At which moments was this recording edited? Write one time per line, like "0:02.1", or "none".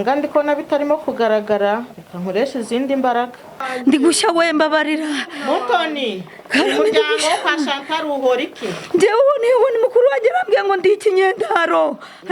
0:03.7